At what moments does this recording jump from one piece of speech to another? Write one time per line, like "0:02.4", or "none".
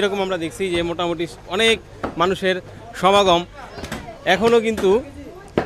none